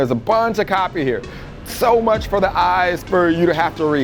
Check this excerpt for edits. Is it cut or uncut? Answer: uncut